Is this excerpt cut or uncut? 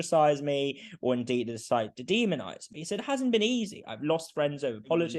uncut